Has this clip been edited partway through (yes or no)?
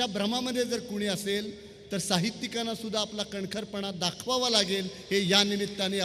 no